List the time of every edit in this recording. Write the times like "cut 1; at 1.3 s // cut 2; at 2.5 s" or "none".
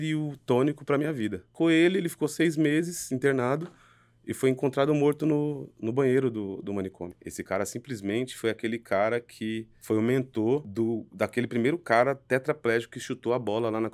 cut 1; at 1.5 s // cut 2; at 7.2 s // cut 3; at 9.7 s // cut 4; at 10.7 s